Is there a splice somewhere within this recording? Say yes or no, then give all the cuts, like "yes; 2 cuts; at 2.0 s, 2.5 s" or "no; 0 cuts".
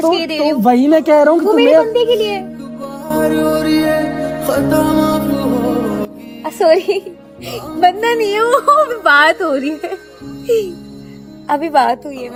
no; 0 cuts